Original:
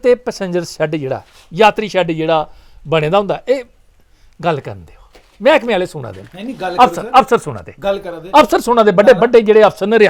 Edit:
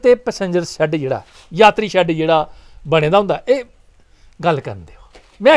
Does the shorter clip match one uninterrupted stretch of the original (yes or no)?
yes